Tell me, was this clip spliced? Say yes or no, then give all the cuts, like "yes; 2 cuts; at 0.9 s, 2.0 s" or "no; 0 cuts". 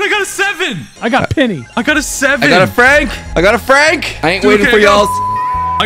yes; 1 cut; at 1.0 s